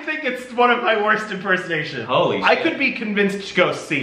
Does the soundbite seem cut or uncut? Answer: cut